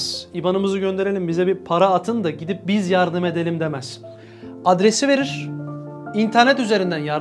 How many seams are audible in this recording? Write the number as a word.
zero